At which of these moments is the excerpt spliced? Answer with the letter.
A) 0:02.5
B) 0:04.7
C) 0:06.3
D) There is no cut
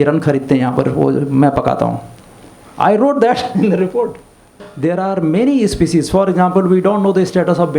B